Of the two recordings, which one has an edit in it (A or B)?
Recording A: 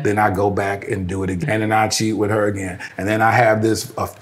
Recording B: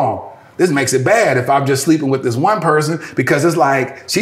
A